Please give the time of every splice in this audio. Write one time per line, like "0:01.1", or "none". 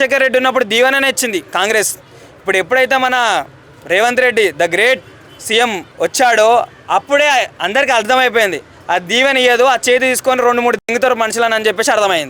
0:05.8